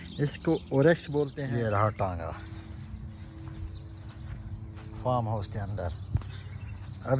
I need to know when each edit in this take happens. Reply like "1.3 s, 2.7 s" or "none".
1.4 s